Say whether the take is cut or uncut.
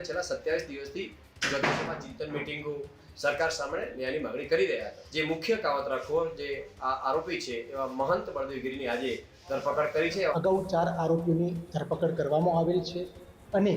cut